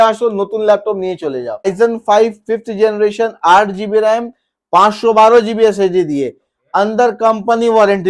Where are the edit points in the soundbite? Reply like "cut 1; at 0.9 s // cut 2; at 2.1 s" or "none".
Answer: cut 1; at 1.7 s